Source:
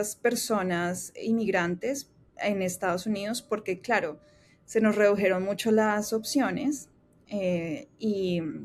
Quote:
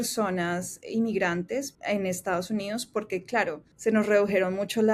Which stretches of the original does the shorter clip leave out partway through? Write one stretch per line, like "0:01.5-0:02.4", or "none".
0:02.1-0:02.3
0:04.2-0:04.6